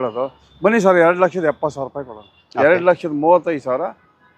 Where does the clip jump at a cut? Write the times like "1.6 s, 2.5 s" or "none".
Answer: 2.3 s